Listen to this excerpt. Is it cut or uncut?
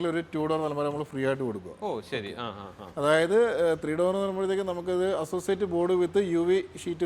uncut